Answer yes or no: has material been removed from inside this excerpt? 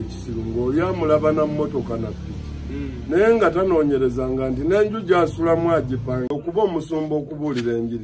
yes